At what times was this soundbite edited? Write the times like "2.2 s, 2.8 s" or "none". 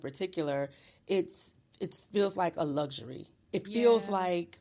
none